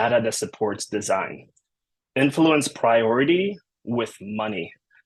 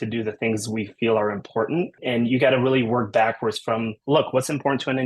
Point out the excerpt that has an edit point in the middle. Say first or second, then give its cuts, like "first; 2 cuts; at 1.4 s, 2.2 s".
second; 2 cuts; at 2.0 s, 3.9 s